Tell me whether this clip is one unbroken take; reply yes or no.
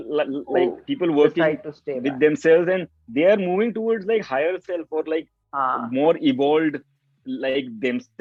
yes